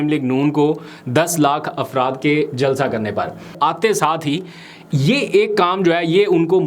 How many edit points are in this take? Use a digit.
1